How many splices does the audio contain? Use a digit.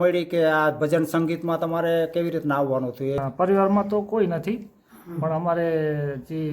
1